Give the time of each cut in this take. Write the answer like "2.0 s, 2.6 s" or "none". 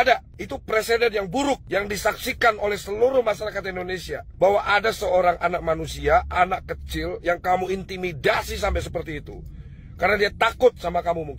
none